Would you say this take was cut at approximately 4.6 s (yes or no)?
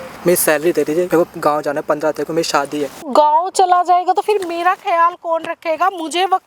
no